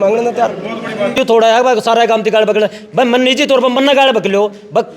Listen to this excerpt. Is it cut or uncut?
cut